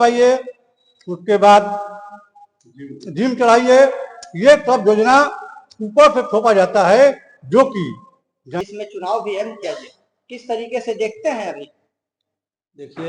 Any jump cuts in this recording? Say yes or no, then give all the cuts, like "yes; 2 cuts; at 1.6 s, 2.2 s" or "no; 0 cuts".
yes; 1 cut; at 8.6 s